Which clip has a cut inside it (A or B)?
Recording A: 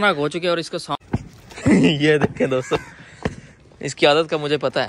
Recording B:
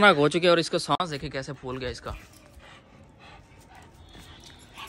A